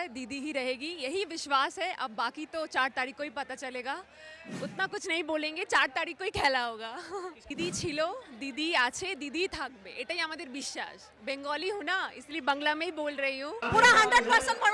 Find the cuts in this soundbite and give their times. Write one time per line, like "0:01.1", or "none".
0:07.4
0:13.6